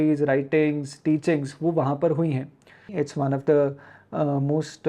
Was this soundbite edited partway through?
yes; 1 cut; at 2.9 s

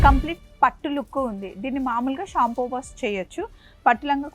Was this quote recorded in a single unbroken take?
yes; 0 cuts

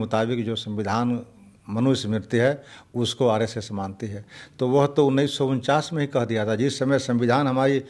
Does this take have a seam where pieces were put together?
no; 0 cuts

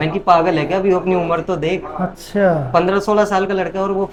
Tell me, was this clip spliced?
no; 0 cuts

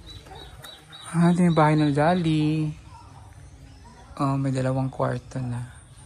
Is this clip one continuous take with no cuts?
yes; 0 cuts

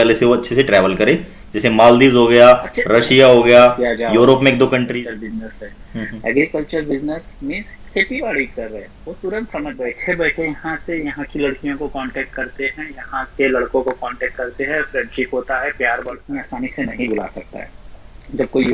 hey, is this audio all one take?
no; 3 cuts; at 4.9 s, 10.0 s, 16.2 s

